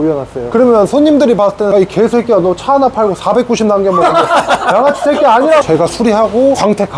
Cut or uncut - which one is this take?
cut